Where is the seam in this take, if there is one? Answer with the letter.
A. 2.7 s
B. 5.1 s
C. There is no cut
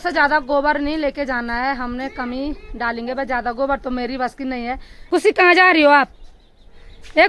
B